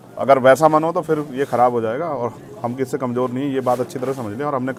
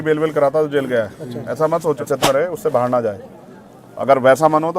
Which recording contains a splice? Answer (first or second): second